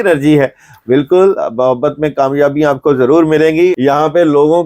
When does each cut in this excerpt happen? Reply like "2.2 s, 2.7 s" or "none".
3.8 s